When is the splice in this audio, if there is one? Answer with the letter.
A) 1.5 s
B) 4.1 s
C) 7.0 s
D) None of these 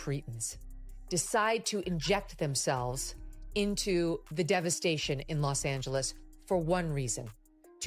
D